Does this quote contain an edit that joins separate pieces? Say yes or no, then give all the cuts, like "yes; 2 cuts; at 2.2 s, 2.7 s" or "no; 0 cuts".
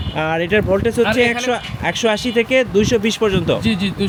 no; 0 cuts